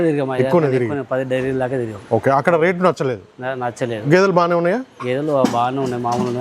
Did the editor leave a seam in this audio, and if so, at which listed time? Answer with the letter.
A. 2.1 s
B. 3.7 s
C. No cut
C